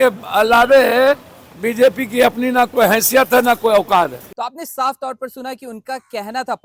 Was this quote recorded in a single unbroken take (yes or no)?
yes